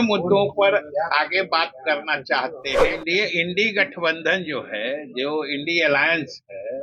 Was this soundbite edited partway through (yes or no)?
yes